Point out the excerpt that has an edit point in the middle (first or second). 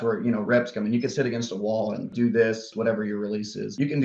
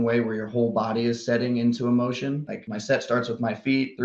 first